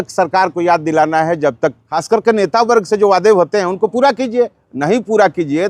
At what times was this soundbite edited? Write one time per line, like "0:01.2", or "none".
0:01.9